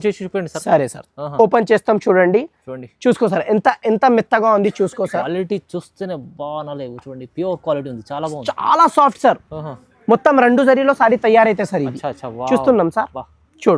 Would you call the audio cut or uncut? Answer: uncut